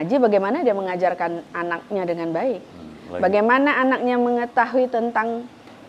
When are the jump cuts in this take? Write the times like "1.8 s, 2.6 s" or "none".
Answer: none